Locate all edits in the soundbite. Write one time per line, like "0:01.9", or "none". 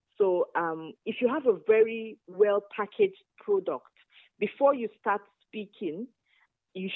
none